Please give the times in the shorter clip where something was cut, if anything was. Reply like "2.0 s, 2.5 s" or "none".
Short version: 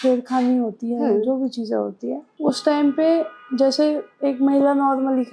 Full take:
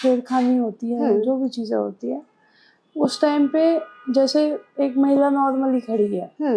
2.3 s